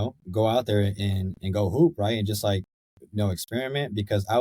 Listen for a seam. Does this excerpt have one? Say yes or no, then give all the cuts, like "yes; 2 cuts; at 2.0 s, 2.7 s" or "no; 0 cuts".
no; 0 cuts